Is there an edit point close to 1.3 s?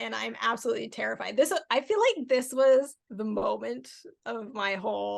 no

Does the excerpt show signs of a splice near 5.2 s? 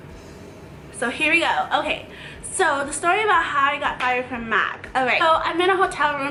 no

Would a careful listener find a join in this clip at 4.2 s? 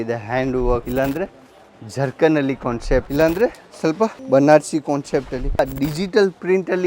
yes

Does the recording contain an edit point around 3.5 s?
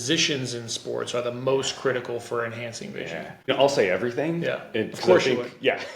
yes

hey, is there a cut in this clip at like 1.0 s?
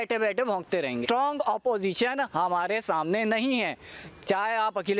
yes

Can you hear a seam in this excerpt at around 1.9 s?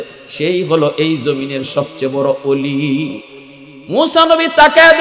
no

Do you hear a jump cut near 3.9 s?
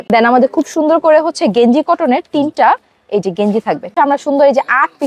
yes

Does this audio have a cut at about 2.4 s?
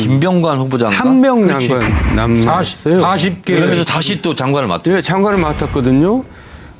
yes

